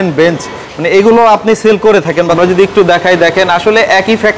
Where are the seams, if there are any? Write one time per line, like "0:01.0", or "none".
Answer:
0:02.2